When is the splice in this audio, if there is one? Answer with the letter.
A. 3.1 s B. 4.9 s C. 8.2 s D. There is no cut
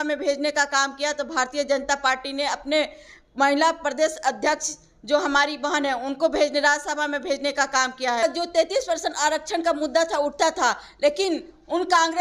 C